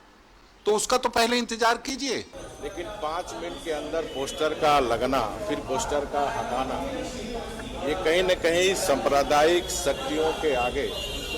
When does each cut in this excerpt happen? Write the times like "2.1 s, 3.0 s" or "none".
2.3 s